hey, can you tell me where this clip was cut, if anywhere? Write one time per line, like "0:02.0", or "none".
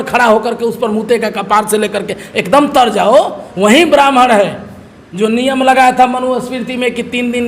0:03.4